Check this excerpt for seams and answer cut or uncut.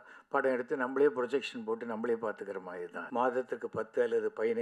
cut